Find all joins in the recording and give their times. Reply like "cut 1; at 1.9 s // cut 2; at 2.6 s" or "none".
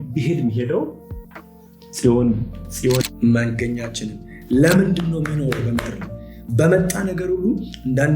cut 1; at 3.0 s

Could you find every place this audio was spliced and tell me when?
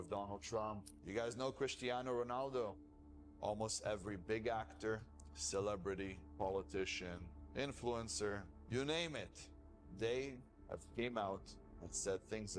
none

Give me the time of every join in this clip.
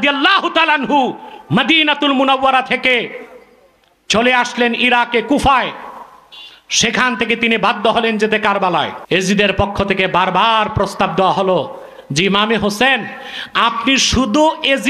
cut 1; at 9.0 s

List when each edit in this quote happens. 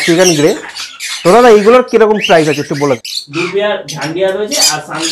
cut 1; at 3.1 s

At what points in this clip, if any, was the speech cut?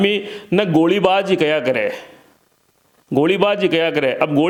none

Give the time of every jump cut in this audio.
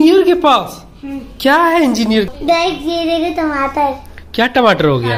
cut 1; at 2.2 s

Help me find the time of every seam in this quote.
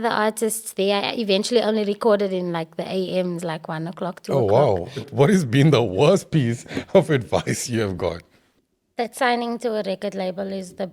cut 1; at 5.1 s

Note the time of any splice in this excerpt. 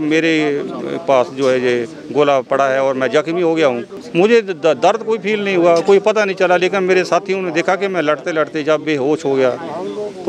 cut 1; at 3.9 s

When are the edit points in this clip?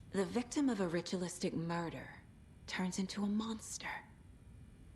cut 1; at 4.1 s

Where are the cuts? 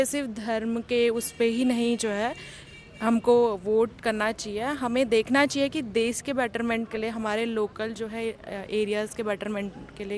none

